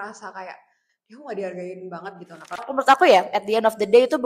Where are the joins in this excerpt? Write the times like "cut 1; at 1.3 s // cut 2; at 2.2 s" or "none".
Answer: cut 1; at 2.7 s